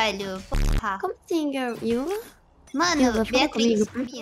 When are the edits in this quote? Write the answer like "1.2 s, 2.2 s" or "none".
none